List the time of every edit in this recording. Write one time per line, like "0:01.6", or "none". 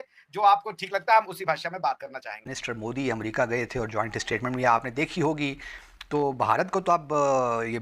0:02.5